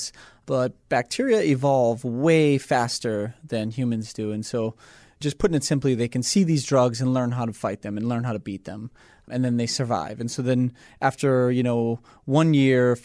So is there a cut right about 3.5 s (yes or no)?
no